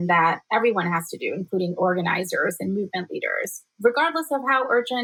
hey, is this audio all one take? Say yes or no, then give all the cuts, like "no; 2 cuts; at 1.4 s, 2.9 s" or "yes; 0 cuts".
yes; 0 cuts